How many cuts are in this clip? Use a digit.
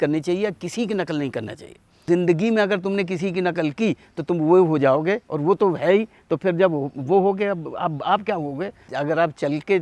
2